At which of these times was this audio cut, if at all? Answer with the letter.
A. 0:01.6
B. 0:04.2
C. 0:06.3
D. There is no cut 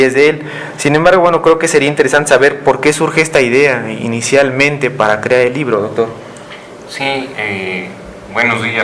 D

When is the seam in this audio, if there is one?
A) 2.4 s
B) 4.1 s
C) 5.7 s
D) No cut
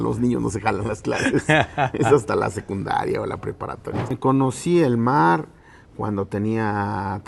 B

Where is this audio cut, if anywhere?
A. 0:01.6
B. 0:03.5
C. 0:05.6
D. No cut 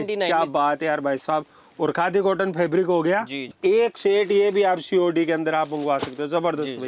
B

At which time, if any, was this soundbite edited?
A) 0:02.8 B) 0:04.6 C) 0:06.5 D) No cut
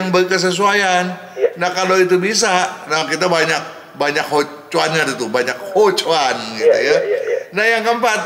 D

